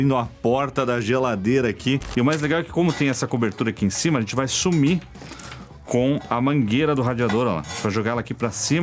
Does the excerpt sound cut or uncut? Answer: cut